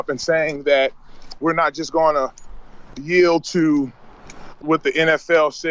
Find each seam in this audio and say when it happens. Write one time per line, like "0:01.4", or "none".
0:04.6